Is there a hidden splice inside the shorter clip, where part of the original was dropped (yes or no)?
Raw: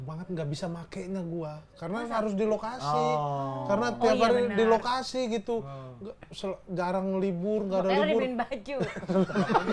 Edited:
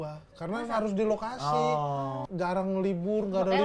yes